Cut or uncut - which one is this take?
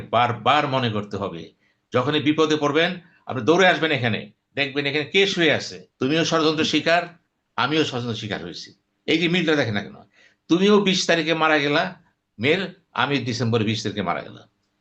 cut